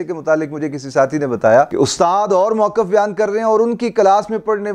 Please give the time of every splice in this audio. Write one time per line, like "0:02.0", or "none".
none